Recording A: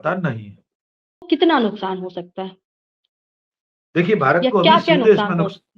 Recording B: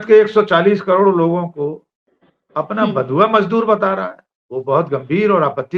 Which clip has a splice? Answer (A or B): A